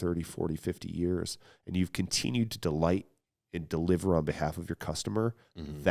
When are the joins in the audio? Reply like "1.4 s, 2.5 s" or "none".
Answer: none